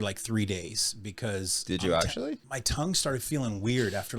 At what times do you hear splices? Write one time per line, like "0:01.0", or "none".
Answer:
0:02.5